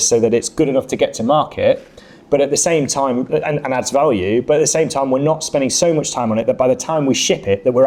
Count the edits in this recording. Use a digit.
0